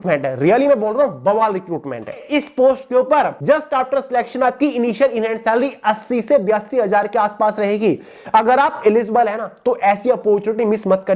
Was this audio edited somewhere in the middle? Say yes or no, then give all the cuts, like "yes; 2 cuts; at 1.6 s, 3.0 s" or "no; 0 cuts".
yes; 3 cuts; at 2.2 s, 3.4 s, 8.1 s